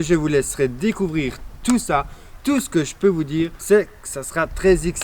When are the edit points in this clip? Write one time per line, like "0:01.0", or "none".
0:03.6